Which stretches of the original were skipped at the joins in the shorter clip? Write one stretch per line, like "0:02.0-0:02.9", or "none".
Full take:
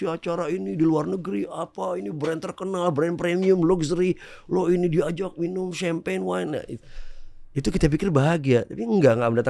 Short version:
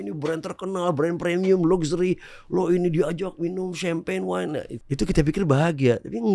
0:06.8-0:07.4